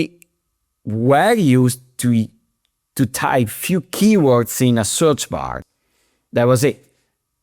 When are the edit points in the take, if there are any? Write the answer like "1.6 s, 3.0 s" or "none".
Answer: 5.6 s